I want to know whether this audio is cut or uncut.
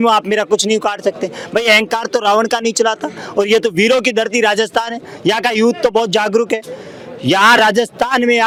uncut